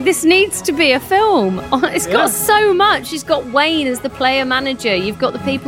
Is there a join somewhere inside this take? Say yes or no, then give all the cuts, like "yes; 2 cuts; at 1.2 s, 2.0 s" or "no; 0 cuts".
no; 0 cuts